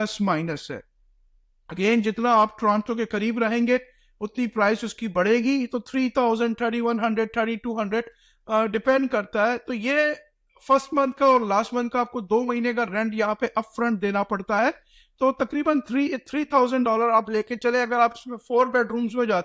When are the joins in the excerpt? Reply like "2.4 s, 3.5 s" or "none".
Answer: none